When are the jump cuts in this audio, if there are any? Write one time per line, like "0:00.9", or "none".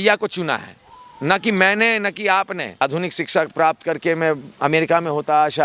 0:02.8